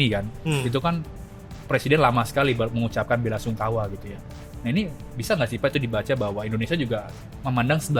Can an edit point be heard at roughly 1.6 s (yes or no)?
no